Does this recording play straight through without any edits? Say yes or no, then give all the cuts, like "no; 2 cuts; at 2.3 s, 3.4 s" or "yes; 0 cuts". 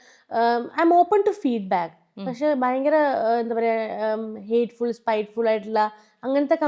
yes; 0 cuts